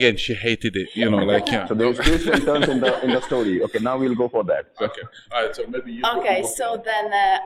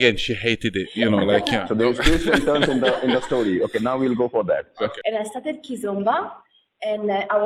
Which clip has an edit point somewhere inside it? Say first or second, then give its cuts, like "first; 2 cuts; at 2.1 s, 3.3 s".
second; 1 cut; at 5.0 s